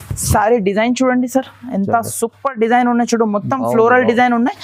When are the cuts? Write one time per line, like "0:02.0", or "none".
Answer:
none